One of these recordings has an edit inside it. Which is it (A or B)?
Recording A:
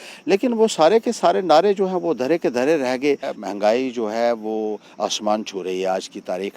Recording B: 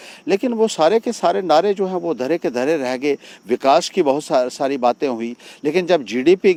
A